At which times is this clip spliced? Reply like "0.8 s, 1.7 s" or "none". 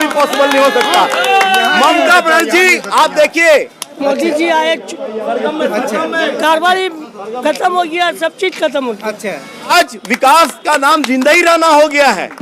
3.9 s, 9.7 s